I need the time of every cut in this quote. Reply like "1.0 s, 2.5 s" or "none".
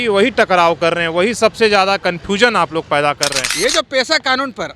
3.4 s